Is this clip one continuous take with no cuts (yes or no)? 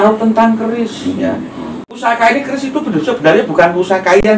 no